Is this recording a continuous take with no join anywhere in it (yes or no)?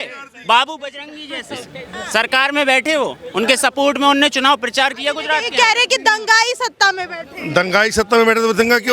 yes